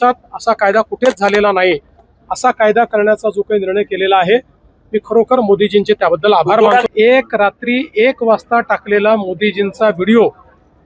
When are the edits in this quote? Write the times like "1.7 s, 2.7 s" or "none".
6.9 s